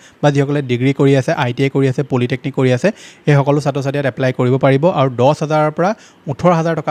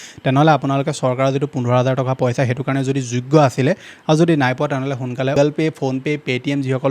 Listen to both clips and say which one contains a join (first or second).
second